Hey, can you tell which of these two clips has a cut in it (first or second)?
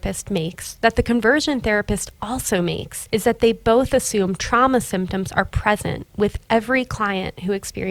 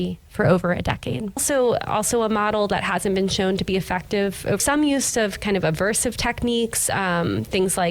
second